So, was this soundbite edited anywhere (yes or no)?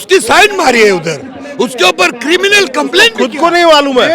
no